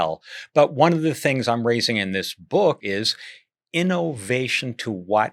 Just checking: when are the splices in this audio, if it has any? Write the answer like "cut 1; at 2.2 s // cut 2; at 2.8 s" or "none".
cut 1; at 2.8 s